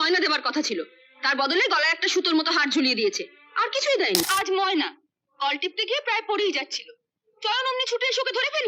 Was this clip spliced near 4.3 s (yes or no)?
yes